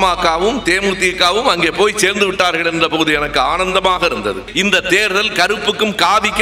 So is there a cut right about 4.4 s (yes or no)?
yes